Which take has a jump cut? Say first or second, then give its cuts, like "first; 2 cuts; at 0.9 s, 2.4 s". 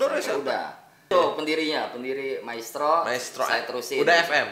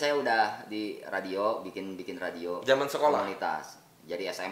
first; 1 cut; at 1.1 s